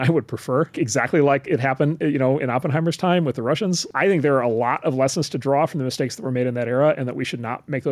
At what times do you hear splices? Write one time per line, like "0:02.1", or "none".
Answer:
0:00.7
0:03.8